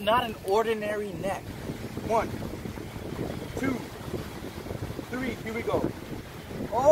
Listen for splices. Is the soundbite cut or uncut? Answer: cut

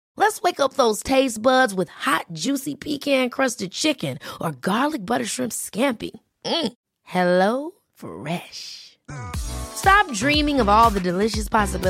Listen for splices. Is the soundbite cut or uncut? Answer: uncut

